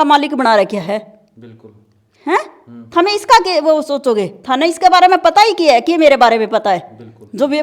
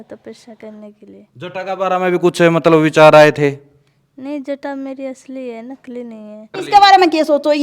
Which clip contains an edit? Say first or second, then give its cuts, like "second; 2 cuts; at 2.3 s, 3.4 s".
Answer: second; 1 cut; at 6.6 s